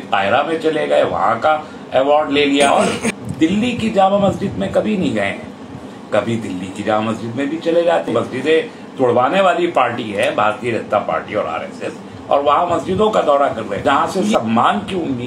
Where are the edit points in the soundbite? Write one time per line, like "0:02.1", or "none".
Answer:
0:02.7
0:08.1
0:13.7